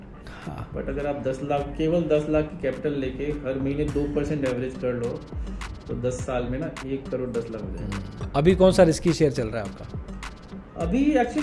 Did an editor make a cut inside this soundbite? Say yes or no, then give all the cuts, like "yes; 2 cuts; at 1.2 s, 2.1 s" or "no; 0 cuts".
yes; 1 cut; at 8.2 s